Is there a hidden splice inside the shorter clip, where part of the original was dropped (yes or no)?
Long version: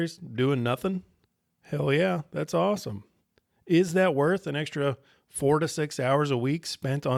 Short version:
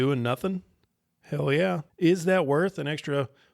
yes